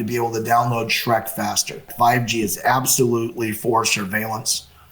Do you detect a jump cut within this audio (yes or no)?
yes